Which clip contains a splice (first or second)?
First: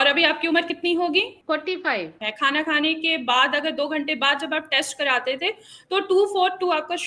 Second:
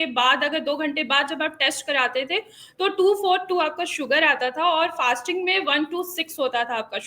first